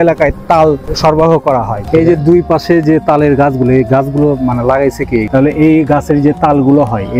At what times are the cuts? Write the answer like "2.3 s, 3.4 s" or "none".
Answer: 1.9 s, 5.3 s